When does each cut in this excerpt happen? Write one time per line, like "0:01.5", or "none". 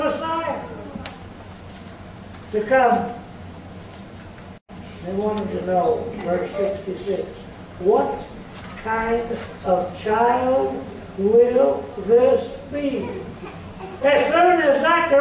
0:04.6